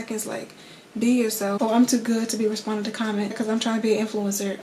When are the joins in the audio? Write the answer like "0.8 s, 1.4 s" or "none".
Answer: 1.6 s, 3.3 s